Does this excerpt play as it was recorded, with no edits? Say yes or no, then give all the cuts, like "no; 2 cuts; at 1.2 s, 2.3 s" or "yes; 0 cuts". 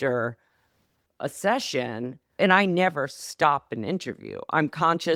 yes; 0 cuts